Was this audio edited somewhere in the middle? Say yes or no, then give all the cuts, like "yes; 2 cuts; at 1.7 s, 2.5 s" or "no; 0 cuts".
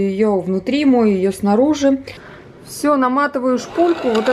yes; 1 cut; at 2.1 s